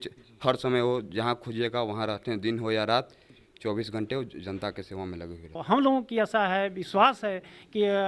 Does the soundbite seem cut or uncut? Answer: cut